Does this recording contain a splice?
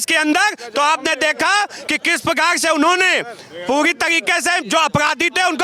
no; 0 cuts

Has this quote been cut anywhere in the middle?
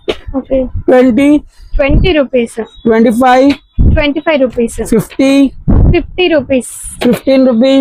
no; 0 cuts

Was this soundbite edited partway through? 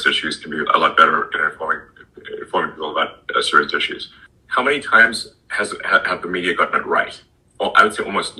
no; 0 cuts

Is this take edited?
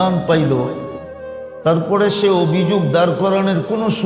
no; 0 cuts

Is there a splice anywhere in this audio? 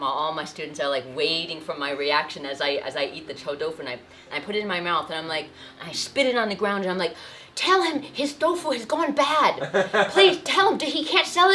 no; 0 cuts

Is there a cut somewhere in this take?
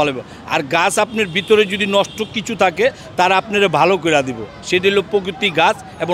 no; 0 cuts

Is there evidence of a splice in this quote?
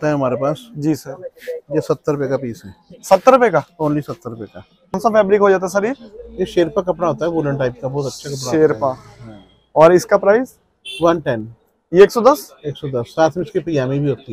yes; 1 cut; at 5.0 s

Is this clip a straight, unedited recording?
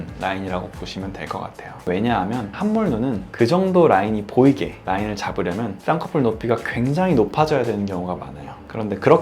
no; 1 cut; at 2.5 s

